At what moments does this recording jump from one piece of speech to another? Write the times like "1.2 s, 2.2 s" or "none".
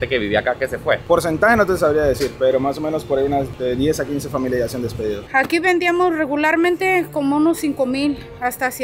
1.0 s, 3.5 s, 5.2 s